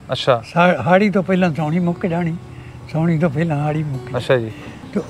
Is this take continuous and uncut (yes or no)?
yes